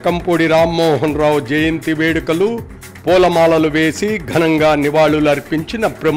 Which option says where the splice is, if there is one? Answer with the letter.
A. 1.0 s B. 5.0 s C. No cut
C